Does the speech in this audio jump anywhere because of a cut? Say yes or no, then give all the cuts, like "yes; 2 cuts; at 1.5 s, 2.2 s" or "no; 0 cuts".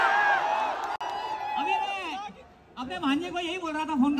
no; 0 cuts